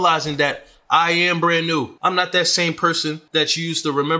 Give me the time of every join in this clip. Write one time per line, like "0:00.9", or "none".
0:01.9
0:03.2

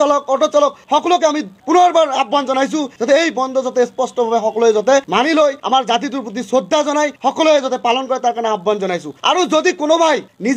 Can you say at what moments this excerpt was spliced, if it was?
none

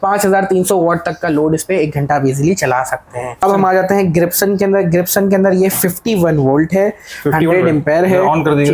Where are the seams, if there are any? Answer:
0:03.2

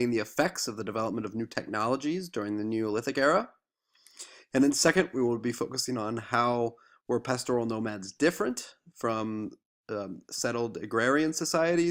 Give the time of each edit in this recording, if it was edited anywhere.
none

